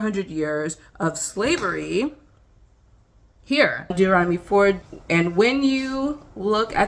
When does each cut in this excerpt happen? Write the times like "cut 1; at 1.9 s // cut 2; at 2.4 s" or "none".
cut 1; at 3.9 s // cut 2; at 4.9 s

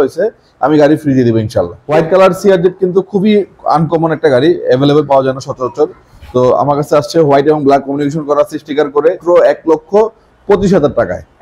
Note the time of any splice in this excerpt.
cut 1; at 1.9 s // cut 2; at 9.2 s

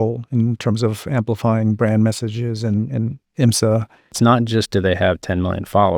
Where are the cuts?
cut 1; at 4.1 s

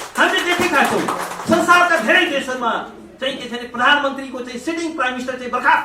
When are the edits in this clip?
none

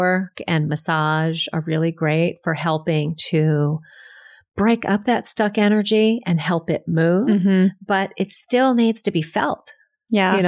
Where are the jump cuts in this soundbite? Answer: none

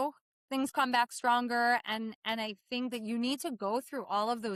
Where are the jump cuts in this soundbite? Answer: none

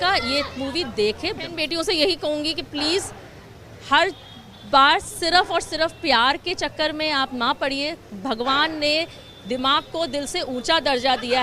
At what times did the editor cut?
cut 1; at 1.4 s

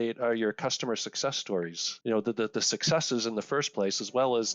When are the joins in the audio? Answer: cut 1; at 1.8 s

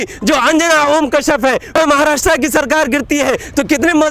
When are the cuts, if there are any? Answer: cut 1; at 1.8 s

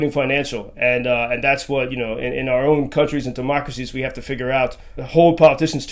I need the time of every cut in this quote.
cut 1; at 4.9 s

